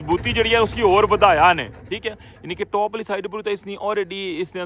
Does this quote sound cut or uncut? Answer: uncut